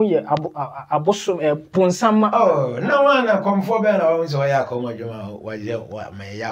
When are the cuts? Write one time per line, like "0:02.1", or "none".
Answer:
none